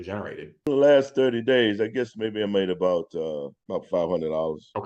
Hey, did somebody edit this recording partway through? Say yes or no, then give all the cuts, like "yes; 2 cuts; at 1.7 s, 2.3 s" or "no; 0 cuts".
no; 0 cuts